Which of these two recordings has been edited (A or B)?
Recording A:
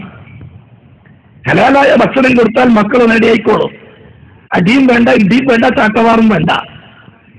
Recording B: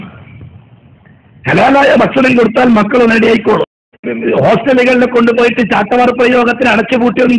B